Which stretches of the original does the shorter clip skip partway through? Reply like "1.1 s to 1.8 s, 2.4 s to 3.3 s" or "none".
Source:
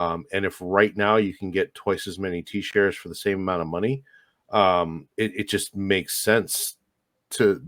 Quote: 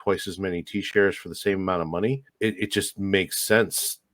4.1 s to 5.0 s